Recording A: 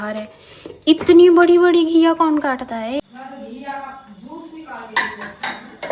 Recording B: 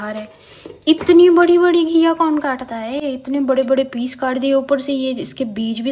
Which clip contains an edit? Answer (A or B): A